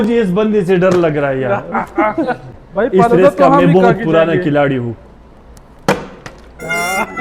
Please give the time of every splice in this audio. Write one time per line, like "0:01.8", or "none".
0:02.5